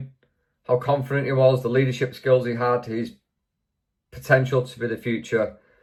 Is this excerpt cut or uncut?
uncut